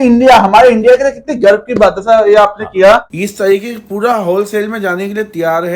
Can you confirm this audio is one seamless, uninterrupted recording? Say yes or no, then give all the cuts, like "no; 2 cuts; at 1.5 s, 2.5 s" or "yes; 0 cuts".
no; 1 cut; at 3.2 s